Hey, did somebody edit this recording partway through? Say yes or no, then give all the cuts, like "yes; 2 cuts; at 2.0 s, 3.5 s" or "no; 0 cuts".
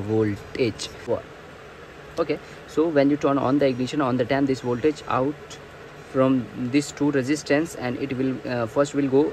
yes; 1 cut; at 0.9 s